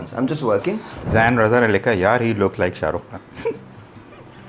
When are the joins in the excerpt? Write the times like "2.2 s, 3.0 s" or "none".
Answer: 1.0 s